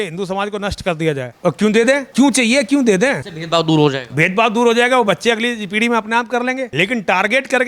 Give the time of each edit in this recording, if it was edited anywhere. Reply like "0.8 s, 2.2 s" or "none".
1.3 s